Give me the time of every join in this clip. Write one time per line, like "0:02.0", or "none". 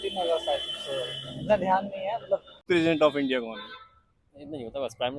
0:02.6